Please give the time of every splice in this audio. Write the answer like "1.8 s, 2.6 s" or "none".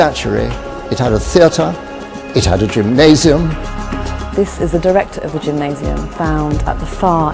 2.9 s

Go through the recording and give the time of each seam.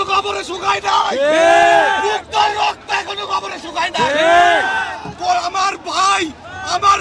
none

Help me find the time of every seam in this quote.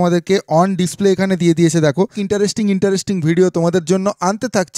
2.2 s

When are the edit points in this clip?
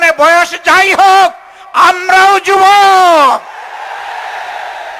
none

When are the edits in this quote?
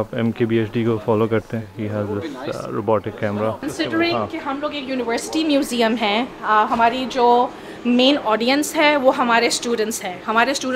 1.8 s, 3.6 s

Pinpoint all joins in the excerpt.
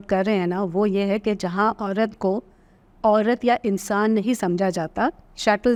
none

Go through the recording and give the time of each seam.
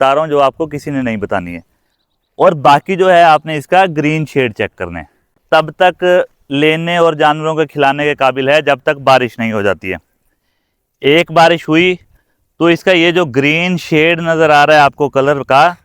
5.4 s

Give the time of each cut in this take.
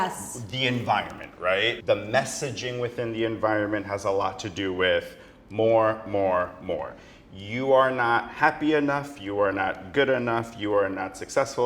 1.8 s

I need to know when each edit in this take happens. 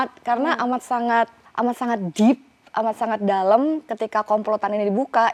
none

